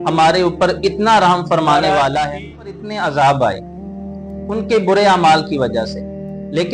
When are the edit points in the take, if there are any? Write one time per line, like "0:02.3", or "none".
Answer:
0:02.8